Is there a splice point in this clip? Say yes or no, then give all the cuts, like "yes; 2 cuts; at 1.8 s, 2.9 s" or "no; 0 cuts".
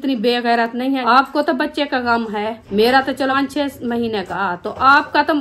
yes; 4 cuts; at 1.0 s, 2.6 s, 3.3 s, 4.3 s